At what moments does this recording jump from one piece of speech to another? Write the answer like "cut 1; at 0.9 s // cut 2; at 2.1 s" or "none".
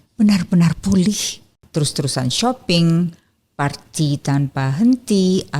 cut 1; at 1.5 s